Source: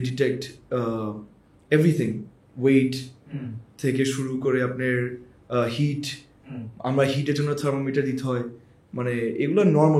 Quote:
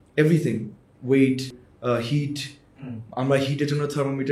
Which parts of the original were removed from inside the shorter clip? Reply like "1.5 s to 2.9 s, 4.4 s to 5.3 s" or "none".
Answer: 3.2 s to 5.3 s

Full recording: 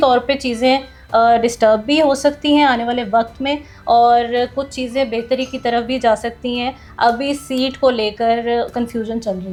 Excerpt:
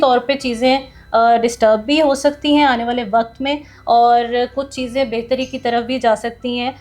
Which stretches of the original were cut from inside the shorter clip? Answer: none

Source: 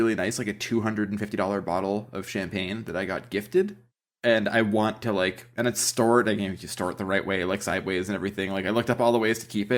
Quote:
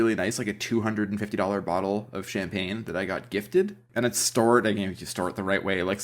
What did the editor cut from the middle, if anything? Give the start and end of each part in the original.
3.8 s to 5.5 s

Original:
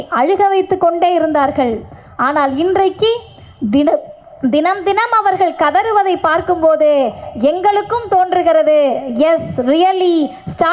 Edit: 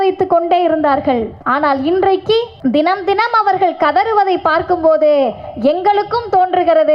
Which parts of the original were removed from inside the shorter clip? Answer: 1.9 s to 2.1 s, 3.3 s to 4.3 s

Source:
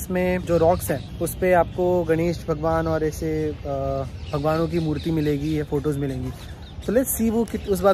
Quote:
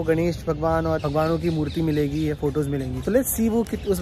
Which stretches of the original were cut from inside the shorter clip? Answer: 3.0 s to 4.3 s, 6.2 s to 6.7 s

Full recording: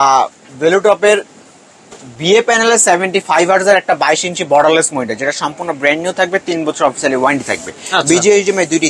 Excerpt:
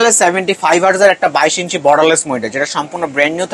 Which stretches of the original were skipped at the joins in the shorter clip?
none

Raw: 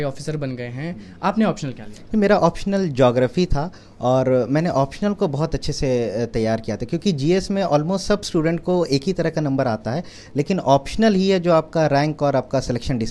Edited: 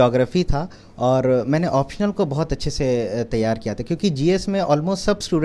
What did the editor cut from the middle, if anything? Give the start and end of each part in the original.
none

